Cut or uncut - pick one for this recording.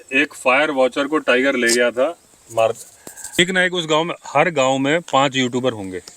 cut